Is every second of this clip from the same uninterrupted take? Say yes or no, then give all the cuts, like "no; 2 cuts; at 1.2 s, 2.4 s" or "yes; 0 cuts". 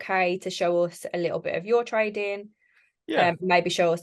yes; 0 cuts